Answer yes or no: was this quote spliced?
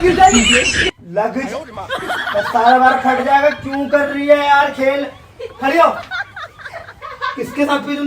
no